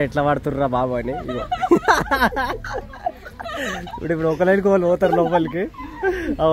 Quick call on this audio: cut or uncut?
uncut